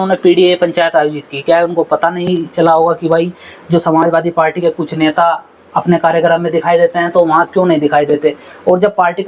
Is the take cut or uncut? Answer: uncut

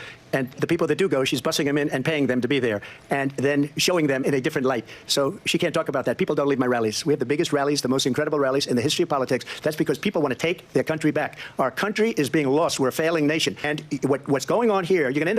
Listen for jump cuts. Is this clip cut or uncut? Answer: cut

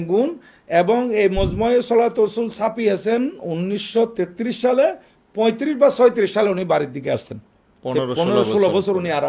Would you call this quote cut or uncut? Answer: uncut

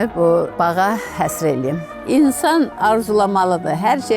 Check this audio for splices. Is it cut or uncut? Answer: cut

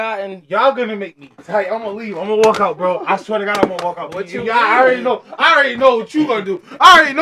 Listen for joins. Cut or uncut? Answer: uncut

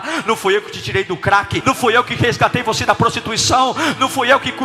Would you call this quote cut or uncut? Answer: cut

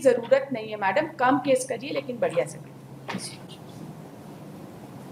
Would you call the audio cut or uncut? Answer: uncut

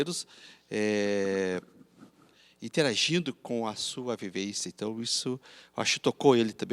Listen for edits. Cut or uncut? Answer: uncut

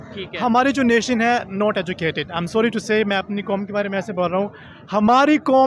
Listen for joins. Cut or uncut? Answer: uncut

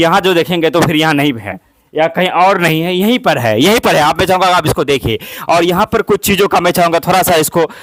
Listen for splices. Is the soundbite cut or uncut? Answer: uncut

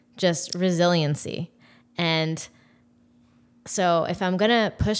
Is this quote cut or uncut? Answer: uncut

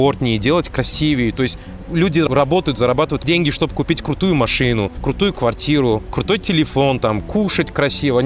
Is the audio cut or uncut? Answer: cut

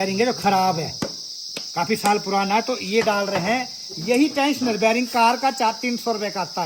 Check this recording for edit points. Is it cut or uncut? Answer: uncut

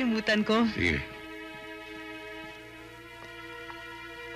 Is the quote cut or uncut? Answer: uncut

